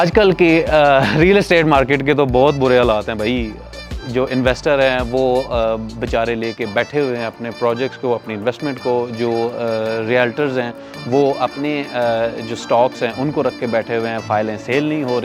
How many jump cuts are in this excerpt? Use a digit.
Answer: 0